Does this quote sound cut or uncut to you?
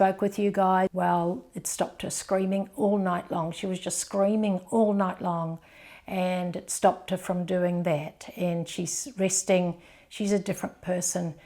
cut